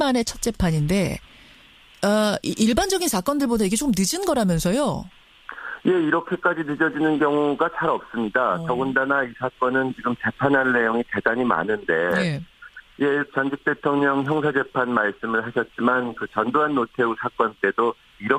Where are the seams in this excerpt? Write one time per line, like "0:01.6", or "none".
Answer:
none

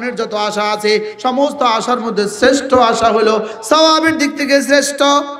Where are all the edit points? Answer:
0:03.5

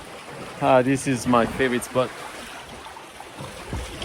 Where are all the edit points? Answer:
0:02.4

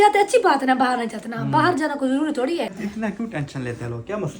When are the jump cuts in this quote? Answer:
0:02.8

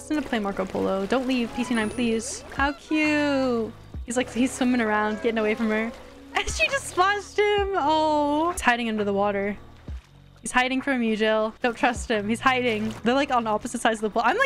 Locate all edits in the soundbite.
0:02.5
0:08.6
0:12.9

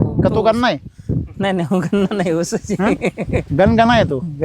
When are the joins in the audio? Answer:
0:03.5

